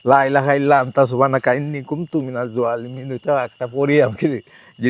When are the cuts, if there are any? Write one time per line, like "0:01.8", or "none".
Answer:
none

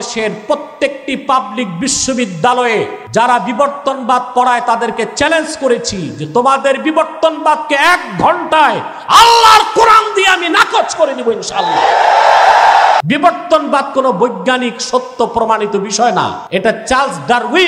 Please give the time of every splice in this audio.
0:03.0
0:13.0
0:16.4

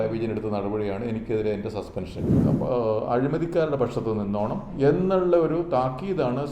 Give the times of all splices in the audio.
0:02.3

